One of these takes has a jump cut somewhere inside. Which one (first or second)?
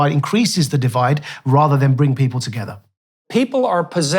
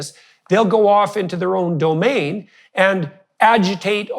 first